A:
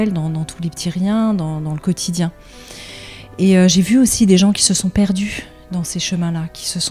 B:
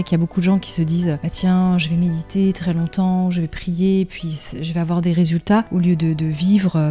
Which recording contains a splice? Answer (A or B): B